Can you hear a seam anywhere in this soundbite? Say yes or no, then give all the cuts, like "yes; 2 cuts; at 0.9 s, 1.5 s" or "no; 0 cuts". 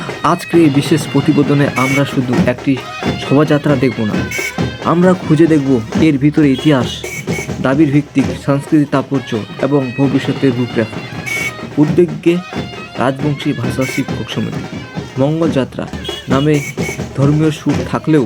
no; 0 cuts